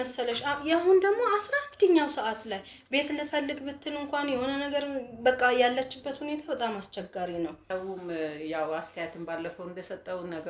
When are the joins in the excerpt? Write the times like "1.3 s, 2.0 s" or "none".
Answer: 7.6 s